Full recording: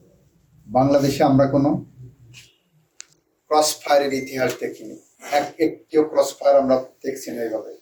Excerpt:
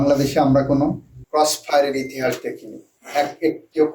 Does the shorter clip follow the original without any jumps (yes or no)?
no